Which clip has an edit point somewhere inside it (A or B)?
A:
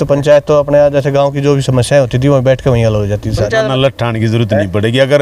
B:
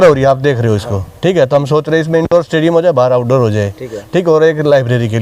A